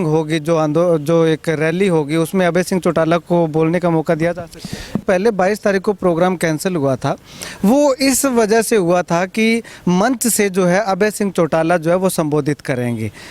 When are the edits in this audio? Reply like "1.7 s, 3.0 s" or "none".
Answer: 5.0 s

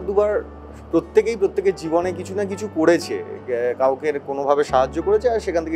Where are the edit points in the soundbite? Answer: none

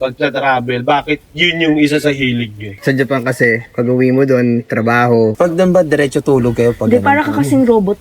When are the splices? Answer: 2.6 s, 5.3 s

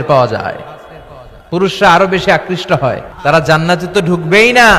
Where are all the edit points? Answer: 3.1 s

